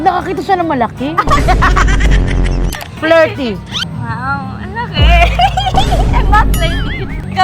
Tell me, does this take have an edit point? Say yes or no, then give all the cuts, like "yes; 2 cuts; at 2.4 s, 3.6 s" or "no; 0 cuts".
yes; 1 cut; at 2.7 s